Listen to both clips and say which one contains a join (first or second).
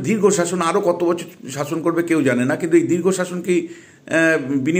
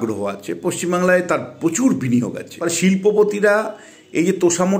second